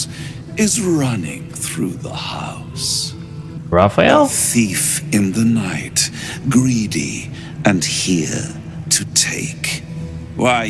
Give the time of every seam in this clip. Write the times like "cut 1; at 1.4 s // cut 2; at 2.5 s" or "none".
cut 1; at 3.6 s